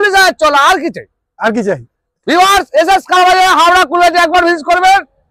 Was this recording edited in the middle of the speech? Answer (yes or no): no